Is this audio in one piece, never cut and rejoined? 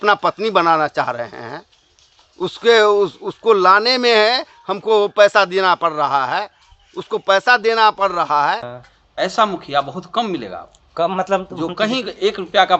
no; 1 cut; at 8.7 s

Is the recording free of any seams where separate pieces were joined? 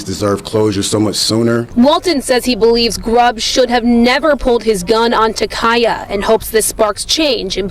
no; 1 cut; at 6.4 s

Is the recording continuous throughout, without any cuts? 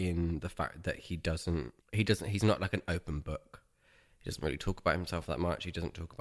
no; 1 cut; at 1.8 s

